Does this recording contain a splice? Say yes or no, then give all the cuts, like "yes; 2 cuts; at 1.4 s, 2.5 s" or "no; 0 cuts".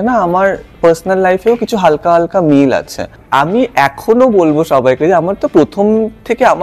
yes; 1 cut; at 3.2 s